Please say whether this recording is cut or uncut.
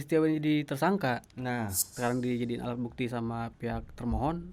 cut